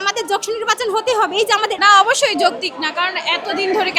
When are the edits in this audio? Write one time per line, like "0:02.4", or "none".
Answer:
0:01.8